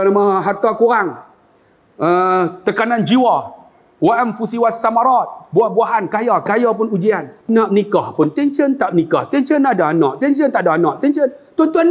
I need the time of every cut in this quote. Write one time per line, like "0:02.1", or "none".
0:07.3